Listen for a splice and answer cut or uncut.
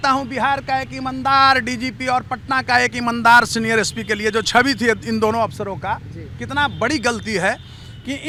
uncut